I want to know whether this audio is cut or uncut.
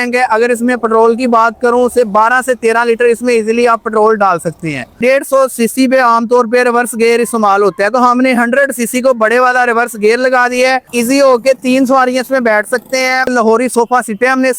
cut